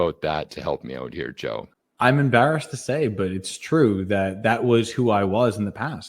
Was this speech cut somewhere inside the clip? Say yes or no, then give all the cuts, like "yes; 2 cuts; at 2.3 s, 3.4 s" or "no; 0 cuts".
yes; 1 cut; at 1.8 s